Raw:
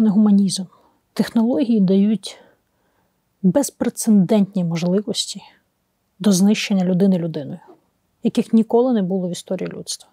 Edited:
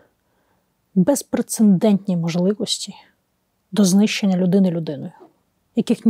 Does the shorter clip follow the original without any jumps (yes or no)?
yes